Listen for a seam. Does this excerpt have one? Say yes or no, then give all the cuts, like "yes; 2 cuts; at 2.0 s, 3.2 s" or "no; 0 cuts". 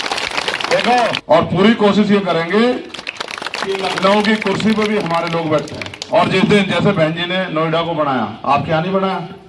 yes; 1 cut; at 1.2 s